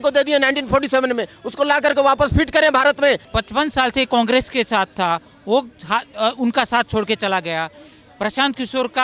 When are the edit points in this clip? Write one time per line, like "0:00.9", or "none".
0:03.3